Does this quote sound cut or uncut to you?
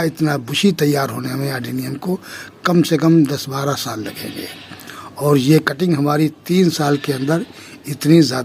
uncut